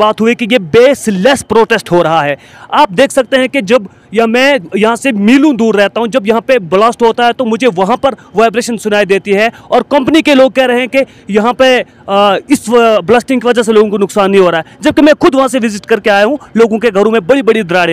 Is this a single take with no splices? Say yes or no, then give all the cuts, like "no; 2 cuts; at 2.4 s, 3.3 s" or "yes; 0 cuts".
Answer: yes; 0 cuts